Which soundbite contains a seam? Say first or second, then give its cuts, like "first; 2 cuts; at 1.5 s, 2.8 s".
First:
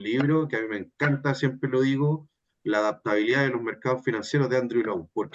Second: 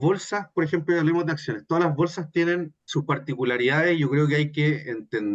second; 1 cut; at 2.8 s